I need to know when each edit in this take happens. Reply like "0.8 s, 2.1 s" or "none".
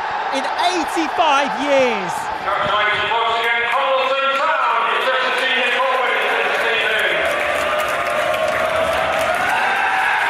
none

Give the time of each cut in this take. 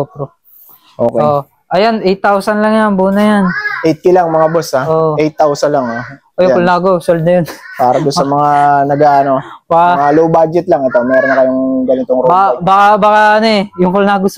1.1 s

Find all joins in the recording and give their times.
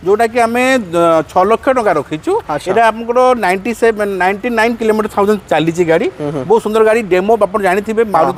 none

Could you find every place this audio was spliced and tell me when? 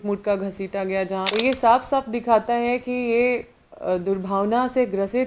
1.3 s

